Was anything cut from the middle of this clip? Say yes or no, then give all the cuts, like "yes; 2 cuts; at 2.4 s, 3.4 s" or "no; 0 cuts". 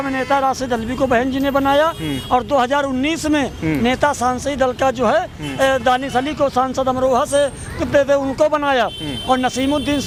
no; 0 cuts